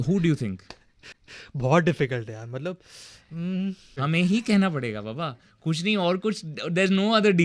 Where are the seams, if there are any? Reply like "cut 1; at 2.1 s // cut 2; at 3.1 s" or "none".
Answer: cut 1; at 3.9 s

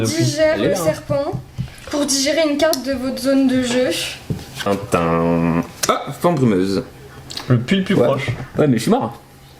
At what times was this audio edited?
cut 1; at 4.7 s

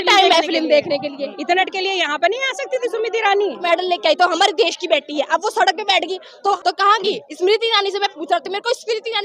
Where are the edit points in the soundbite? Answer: cut 1; at 1.6 s // cut 2; at 3.6 s // cut 3; at 6.6 s

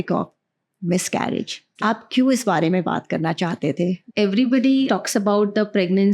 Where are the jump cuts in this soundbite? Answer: cut 1; at 1.7 s // cut 2; at 4.0 s // cut 3; at 4.9 s

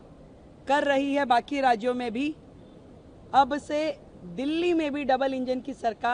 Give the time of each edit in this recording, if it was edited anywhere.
none

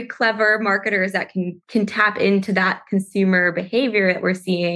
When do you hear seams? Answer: cut 1; at 1.6 s

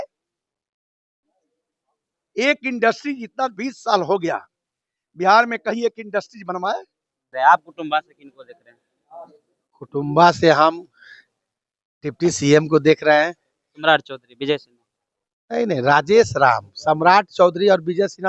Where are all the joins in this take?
cut 1; at 7.2 s

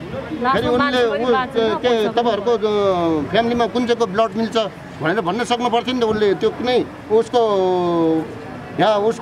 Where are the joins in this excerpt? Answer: none

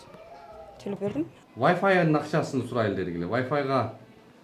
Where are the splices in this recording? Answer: cut 1; at 1.3 s

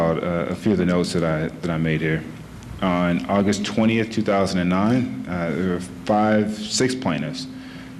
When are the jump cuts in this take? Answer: cut 1; at 7.0 s

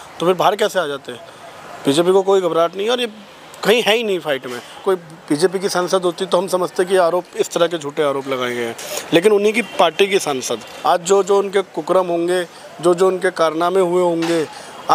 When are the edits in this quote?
cut 1; at 4.8 s // cut 2; at 10.7 s

